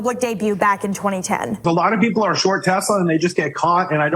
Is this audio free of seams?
no; 1 cut; at 1.6 s

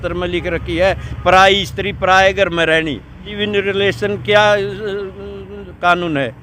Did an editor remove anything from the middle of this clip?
yes; 1 cut; at 3.3 s

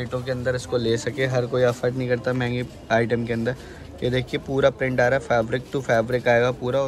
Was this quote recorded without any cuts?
yes; 0 cuts

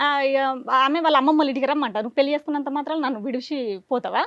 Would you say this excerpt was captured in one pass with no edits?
yes; 0 cuts

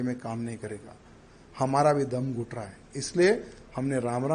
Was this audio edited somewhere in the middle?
no; 0 cuts

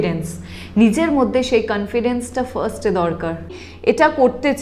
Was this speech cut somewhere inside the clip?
yes; 1 cut; at 3.5 s

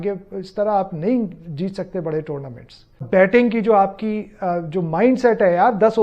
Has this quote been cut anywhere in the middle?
yes; 1 cut; at 3.0 s

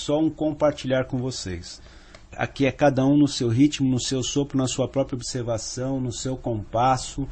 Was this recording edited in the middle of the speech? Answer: yes; 1 cut; at 4.2 s

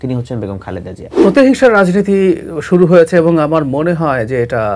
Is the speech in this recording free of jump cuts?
no; 1 cut; at 1.2 s

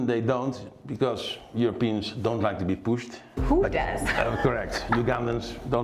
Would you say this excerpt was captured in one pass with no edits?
yes; 0 cuts

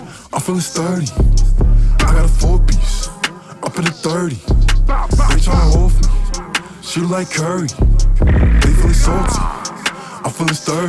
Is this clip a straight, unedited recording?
yes; 0 cuts

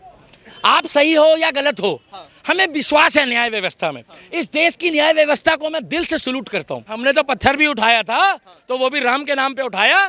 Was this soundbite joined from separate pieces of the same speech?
yes; 1 cut; at 6.9 s

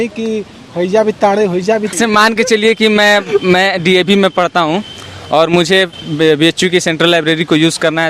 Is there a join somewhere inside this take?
yes; 1 cut; at 1.9 s

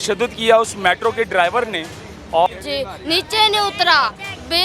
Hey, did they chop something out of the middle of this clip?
yes; 1 cut; at 2.5 s

